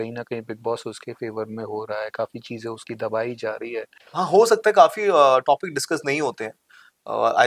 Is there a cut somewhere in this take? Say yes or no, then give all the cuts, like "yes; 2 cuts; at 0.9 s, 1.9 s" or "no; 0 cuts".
yes; 1 cut; at 4.0 s